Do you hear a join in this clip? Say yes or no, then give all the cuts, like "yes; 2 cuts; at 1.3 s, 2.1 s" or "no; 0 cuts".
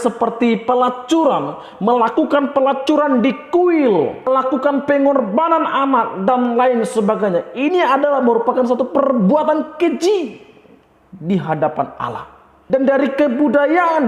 yes; 2 cuts; at 4.3 s, 12.5 s